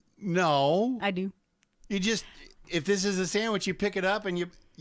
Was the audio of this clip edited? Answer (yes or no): no